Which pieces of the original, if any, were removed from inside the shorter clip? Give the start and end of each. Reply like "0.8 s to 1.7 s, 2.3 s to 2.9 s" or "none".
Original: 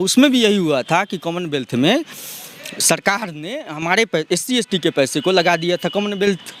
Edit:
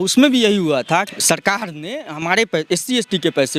1.1 s to 2.7 s

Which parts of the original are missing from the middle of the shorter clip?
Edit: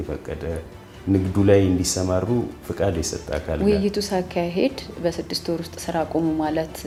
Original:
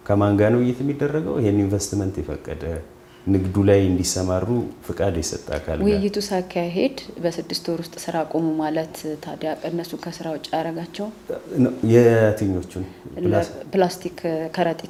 none

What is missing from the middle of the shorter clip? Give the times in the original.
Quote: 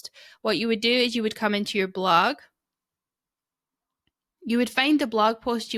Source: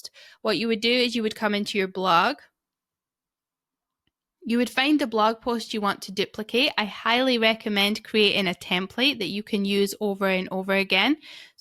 none

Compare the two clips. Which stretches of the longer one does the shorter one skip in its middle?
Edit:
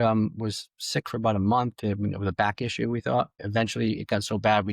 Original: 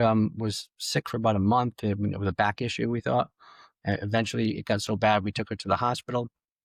3.5 s to 4.0 s

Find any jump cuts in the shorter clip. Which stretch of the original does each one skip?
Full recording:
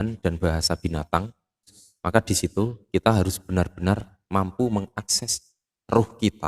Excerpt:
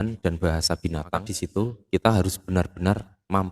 1.4 s to 2.4 s

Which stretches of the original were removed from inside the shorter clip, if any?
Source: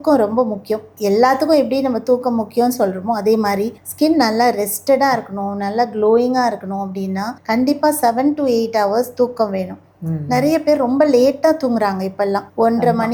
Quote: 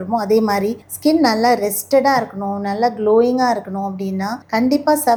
none

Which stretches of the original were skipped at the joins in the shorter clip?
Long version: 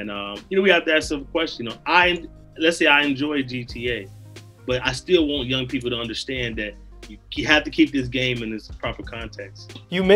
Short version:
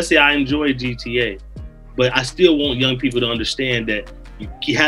none

